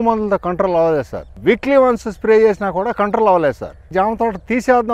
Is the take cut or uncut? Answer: cut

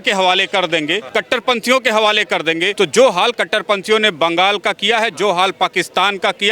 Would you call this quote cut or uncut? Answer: cut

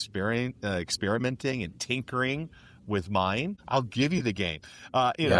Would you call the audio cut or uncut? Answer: cut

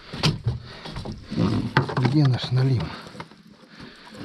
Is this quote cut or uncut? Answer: uncut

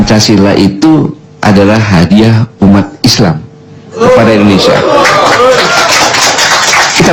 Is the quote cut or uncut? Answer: uncut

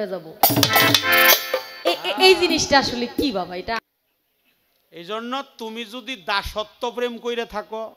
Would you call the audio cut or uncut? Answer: cut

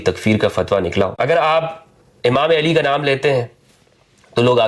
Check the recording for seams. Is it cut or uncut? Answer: cut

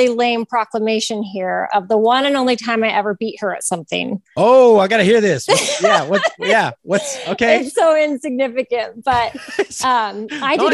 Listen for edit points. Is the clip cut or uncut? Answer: uncut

